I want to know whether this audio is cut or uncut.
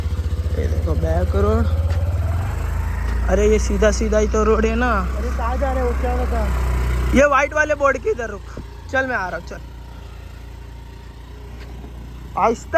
uncut